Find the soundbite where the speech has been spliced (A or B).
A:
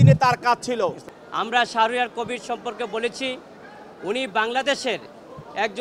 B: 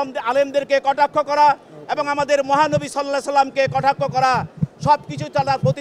A